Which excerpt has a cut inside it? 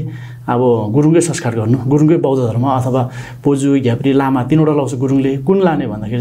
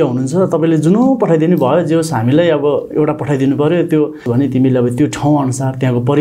second; 1 cut; at 4.2 s

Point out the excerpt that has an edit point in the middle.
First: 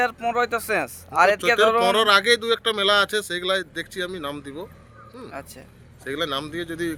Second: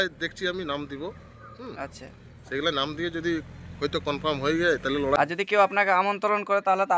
second; 1 cut; at 5.2 s

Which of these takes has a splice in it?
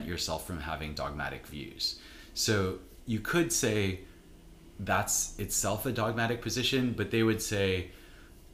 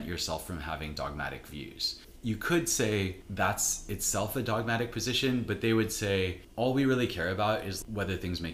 second; 4 cuts; at 2.1 s, 3.2 s, 6.4 s, 7.8 s

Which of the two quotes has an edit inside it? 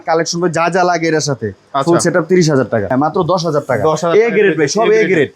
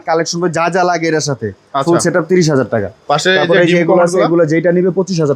first; 1 cut; at 2.9 s

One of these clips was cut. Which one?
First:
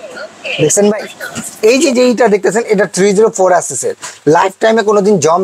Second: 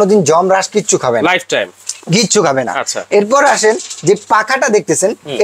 first; 1 cut; at 1.5 s

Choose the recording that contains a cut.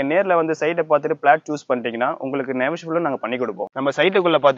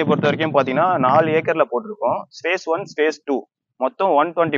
first; 1 cut; at 3.6 s

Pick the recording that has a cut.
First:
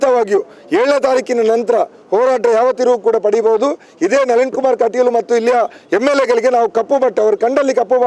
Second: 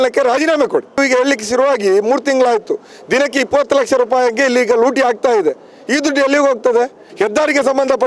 second; 2 cuts; at 1.0 s, 7.0 s

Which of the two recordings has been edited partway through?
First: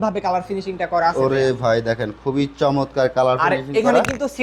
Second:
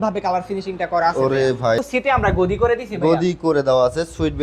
second; 1 cut; at 1.8 s

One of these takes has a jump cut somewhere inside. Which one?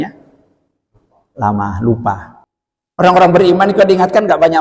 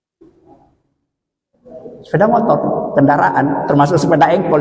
first; 1 cut; at 2.4 s

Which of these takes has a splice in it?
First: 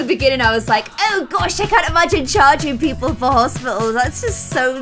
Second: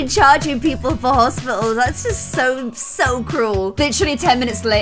second; 1 cut; at 3.7 s

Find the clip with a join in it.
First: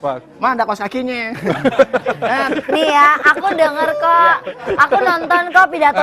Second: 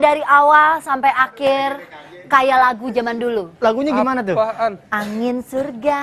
first; 1 cut; at 2.2 s

